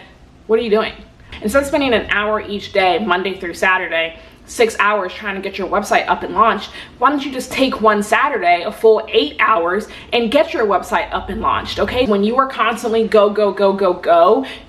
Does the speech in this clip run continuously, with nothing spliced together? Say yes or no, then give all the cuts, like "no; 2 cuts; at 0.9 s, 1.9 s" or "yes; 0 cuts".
no; 2 cuts; at 1.2 s, 12.1 s